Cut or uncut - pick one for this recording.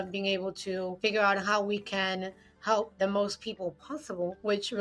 uncut